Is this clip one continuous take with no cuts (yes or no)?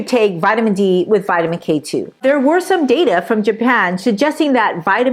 no